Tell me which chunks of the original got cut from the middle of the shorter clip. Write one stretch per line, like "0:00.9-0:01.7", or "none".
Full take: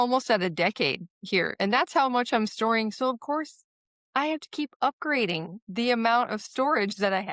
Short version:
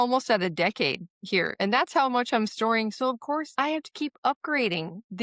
0:03.5-0:04.1